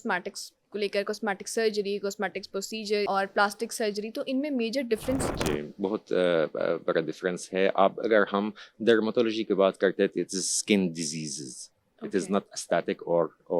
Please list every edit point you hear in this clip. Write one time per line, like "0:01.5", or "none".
0:03.1
0:05.4